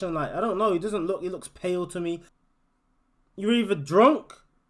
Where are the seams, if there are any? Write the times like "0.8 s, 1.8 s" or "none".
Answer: 2.3 s

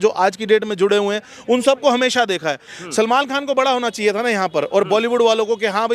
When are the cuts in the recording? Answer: 2.7 s

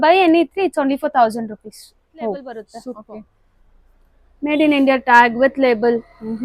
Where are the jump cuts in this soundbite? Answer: 2.8 s

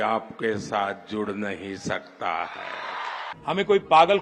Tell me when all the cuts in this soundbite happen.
3.2 s

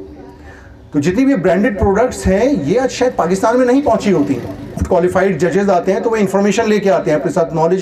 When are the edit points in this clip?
4.8 s

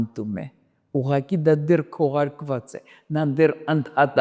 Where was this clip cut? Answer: none

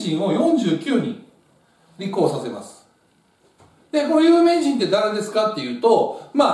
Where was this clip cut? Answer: none

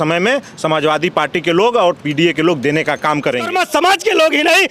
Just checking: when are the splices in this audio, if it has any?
3.5 s

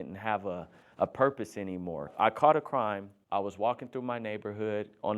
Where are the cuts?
2.1 s, 3.1 s

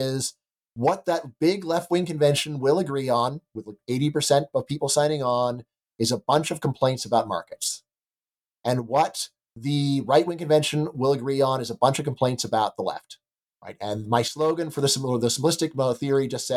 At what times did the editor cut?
none

